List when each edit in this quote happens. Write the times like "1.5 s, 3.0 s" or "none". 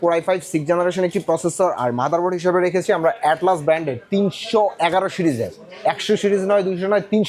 none